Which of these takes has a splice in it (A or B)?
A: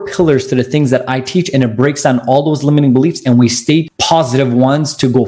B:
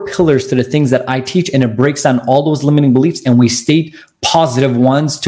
A